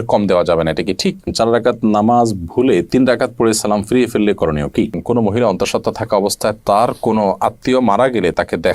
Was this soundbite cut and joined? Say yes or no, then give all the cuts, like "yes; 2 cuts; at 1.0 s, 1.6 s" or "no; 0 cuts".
yes; 2 cuts; at 1.3 s, 5.0 s